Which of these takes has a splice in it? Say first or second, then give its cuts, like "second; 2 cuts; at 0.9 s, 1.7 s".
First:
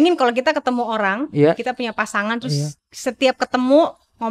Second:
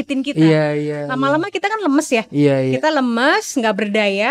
first; 1 cut; at 2.8 s